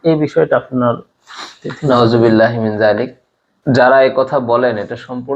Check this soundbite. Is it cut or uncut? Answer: cut